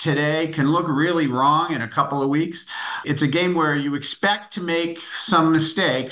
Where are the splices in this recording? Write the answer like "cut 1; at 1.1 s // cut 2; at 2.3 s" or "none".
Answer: cut 1; at 3.0 s